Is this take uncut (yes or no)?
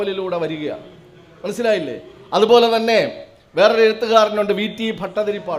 yes